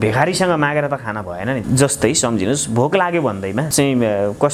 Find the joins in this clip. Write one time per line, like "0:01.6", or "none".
0:01.6
0:03.7